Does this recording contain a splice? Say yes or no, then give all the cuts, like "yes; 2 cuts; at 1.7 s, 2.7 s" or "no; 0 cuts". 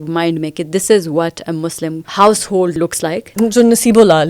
yes; 2 cuts; at 2.0 s, 3.2 s